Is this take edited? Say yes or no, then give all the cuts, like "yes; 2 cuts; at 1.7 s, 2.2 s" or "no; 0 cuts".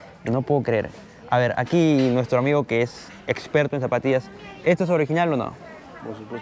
no; 0 cuts